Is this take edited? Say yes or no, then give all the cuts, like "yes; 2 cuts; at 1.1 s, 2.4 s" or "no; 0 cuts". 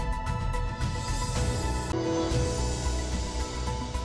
yes; 1 cut; at 1.9 s